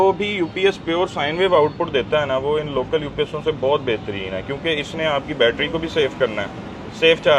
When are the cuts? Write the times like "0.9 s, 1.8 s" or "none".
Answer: none